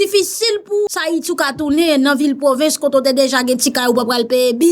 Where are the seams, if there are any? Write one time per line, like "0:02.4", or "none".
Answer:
0:01.0